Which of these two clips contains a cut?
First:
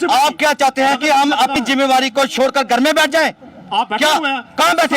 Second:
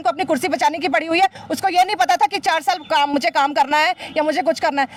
first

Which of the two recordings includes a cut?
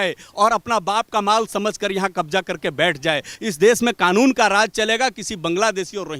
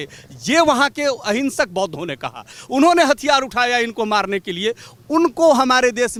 first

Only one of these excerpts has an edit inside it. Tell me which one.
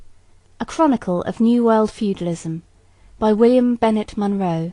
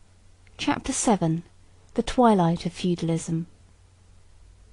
first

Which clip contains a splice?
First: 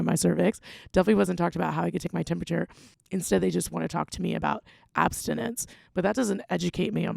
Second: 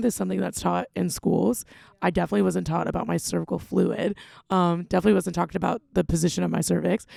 first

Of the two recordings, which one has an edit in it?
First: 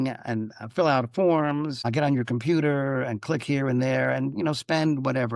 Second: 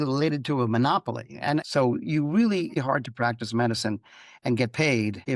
second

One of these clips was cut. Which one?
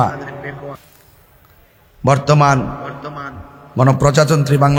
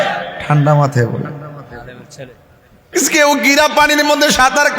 second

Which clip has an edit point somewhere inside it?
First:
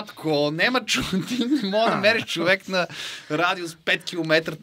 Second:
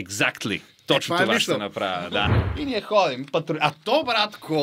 second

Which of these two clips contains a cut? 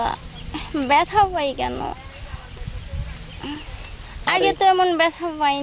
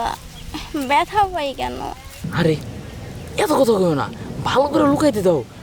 second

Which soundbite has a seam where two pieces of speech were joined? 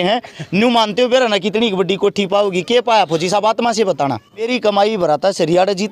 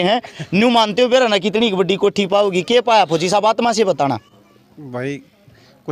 first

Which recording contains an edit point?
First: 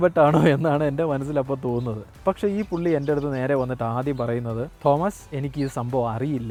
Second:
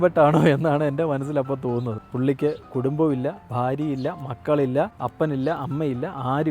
second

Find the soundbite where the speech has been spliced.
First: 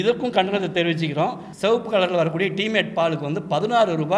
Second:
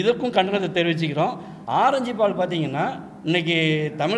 first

